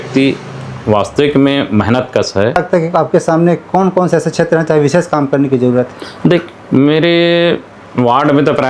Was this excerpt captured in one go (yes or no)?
no